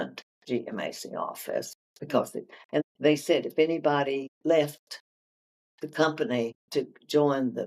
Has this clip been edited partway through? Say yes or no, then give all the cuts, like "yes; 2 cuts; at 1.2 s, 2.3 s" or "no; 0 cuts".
yes; 3 cuts; at 2.8 s, 4.3 s, 6.6 s